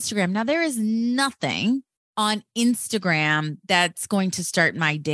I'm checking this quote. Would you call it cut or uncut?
cut